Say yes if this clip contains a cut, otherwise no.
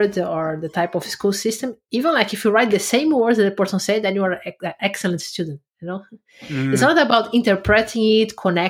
no